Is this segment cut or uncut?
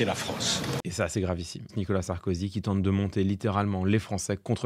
uncut